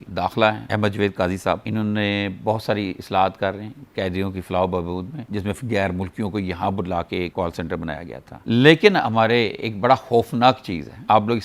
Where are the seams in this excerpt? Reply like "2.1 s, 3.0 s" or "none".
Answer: 5.2 s, 8.2 s